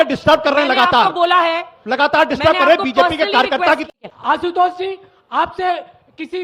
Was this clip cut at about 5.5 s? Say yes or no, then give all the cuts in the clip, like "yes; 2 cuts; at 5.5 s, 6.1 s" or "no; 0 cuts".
no; 1 cut; at 3.8 s